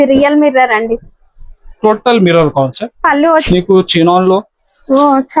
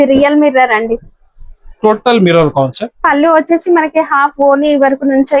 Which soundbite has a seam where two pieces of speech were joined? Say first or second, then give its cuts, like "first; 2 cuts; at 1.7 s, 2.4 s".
first; 1 cut; at 3.4 s